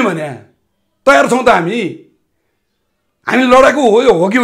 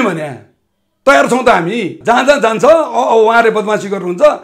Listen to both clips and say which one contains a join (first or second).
second